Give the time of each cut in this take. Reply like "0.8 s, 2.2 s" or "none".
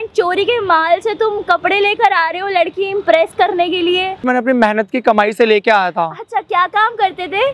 4.2 s